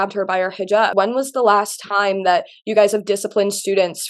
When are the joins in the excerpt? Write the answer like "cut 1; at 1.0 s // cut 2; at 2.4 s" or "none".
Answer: cut 1; at 0.9 s